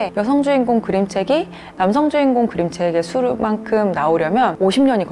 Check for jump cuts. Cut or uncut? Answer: uncut